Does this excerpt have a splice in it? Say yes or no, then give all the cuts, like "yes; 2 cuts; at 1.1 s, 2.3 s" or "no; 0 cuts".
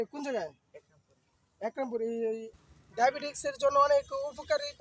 yes; 1 cut; at 2.6 s